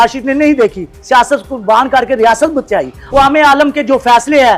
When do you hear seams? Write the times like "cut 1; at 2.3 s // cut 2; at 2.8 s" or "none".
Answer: cut 1; at 3.0 s